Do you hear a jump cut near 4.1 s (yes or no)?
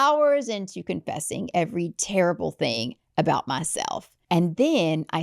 yes